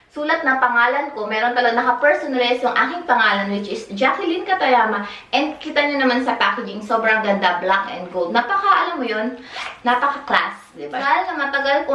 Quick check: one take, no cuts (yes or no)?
no